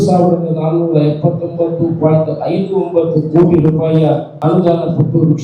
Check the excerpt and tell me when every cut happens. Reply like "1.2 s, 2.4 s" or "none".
4.3 s